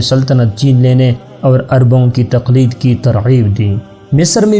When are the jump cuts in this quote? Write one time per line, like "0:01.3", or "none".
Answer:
none